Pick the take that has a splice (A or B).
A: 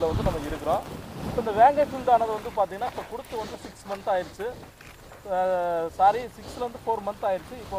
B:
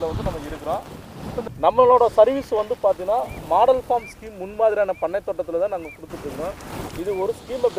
B